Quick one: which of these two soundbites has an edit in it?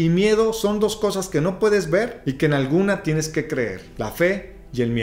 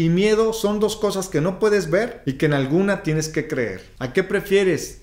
second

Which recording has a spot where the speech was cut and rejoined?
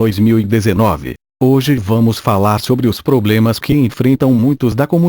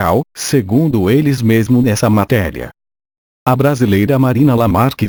first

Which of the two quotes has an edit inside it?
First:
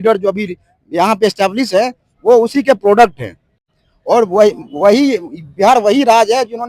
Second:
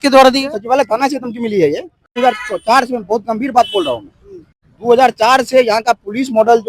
second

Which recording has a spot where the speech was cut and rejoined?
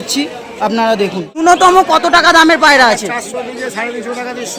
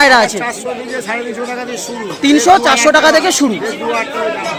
first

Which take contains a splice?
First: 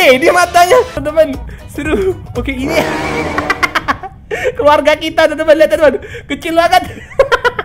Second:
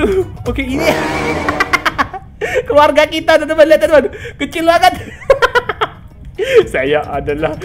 first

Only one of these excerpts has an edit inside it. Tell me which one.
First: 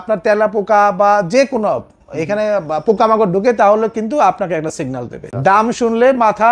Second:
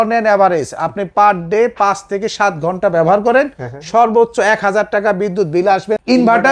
first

